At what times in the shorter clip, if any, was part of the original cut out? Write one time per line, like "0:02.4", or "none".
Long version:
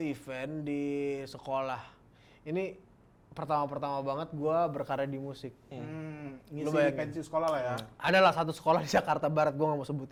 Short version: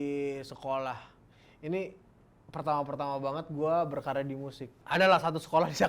0:04.7